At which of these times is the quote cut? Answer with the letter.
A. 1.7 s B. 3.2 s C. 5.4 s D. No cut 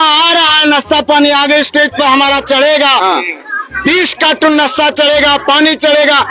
C